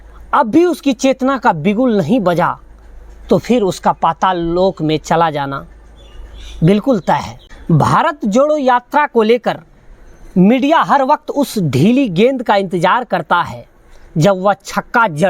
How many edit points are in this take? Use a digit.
1